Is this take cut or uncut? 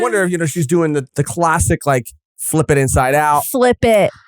cut